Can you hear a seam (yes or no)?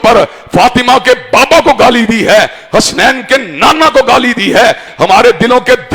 yes